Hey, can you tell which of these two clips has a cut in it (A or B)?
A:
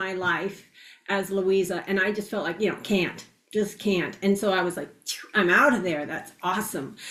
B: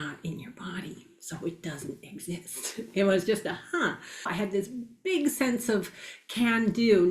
B